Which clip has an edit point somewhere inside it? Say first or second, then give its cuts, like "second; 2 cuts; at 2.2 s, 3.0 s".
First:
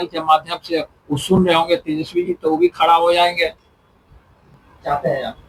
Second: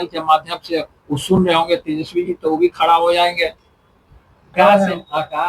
second; 1 cut; at 4.5 s